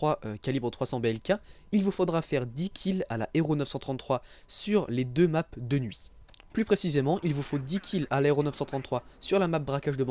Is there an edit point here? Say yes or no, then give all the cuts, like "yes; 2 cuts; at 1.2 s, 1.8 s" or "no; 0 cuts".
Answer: yes; 1 cut; at 2.9 s